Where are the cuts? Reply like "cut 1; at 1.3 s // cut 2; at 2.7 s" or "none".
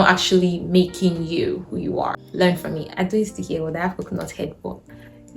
cut 1; at 2.2 s